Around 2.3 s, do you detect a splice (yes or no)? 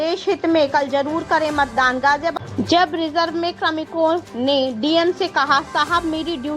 yes